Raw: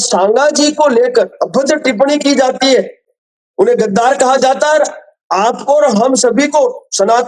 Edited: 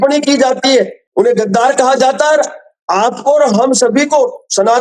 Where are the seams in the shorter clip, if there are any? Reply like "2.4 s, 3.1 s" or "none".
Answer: 1.0 s

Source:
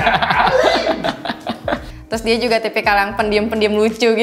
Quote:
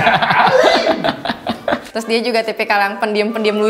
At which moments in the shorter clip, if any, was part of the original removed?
1.9 s

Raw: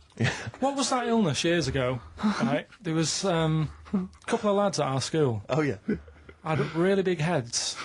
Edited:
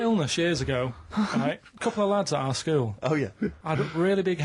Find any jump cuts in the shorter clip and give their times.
1.7 s, 3.6 s

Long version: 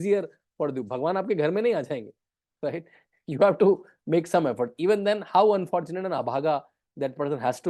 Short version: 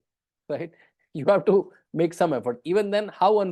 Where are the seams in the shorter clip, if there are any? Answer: none

